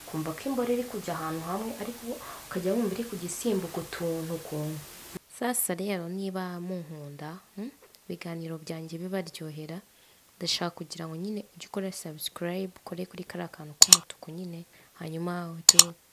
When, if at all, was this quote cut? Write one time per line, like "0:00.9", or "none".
0:05.0